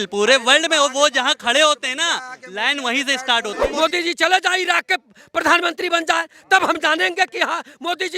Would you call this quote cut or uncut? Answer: cut